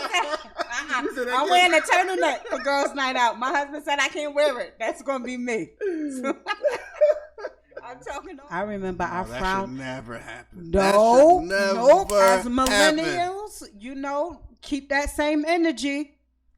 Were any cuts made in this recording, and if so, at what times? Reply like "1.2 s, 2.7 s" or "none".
8.1 s